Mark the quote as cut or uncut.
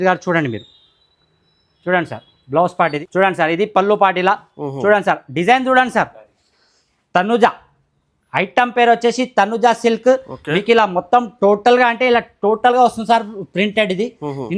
cut